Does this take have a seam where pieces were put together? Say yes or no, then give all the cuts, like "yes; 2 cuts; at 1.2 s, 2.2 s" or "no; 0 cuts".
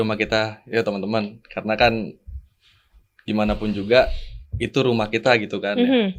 no; 0 cuts